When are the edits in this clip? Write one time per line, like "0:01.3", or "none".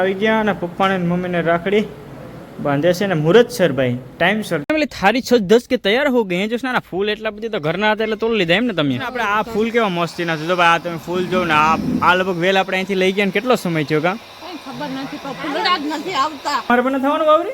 0:04.6
0:09.2
0:16.7